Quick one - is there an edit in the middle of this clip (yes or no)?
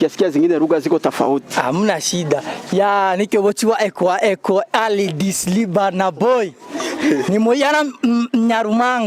no